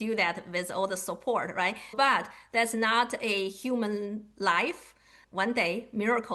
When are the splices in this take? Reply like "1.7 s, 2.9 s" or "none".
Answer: 1.9 s, 5.2 s